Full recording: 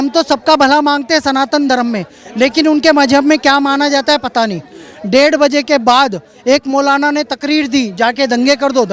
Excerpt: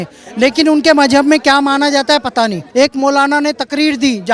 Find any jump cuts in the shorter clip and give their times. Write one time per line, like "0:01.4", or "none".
0:02.6